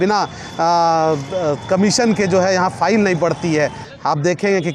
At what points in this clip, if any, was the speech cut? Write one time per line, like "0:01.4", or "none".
0:03.8